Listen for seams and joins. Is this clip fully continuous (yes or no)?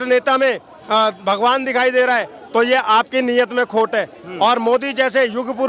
yes